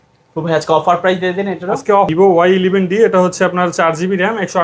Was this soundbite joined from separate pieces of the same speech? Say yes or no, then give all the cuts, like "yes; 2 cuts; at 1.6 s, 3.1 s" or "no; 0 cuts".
yes; 1 cut; at 2.1 s